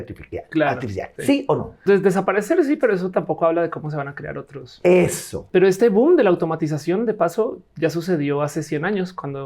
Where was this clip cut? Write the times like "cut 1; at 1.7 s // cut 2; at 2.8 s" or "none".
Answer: cut 1; at 1.3 s // cut 2; at 5.3 s